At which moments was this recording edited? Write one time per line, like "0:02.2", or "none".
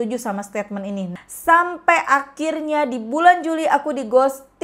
0:01.1